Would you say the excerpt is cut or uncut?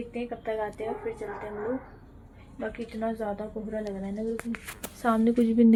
uncut